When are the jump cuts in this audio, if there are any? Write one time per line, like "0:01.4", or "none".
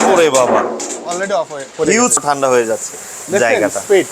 0:02.2